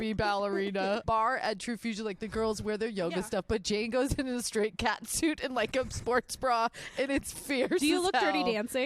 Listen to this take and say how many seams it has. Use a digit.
1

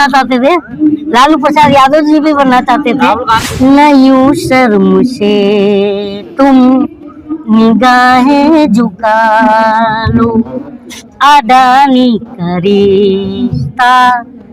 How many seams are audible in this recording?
1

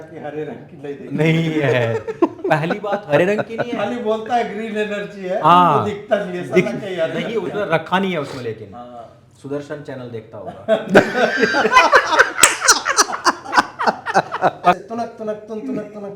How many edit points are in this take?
1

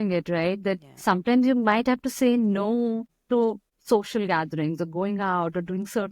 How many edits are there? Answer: 1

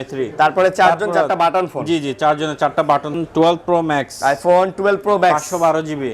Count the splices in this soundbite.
1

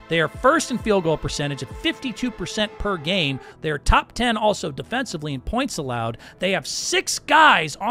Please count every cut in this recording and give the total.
1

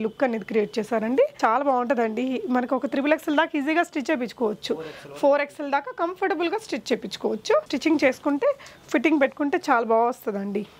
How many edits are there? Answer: 2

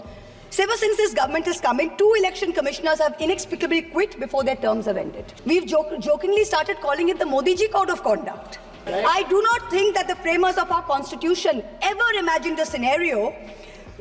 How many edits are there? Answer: 2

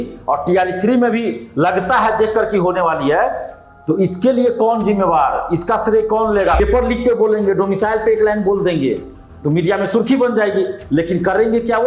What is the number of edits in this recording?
1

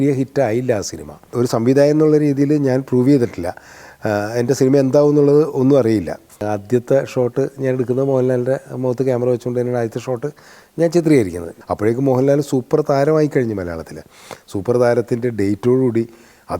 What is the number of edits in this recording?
3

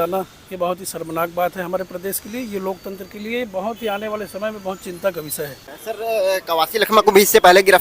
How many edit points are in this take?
1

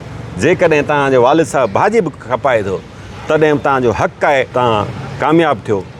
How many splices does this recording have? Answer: 1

